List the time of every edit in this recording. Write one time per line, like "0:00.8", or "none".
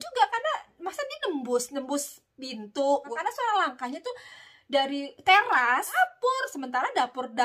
0:03.1
0:06.0